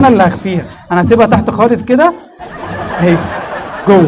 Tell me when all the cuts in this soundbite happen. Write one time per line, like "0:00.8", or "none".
none